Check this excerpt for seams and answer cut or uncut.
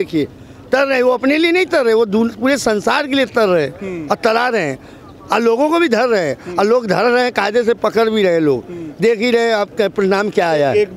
uncut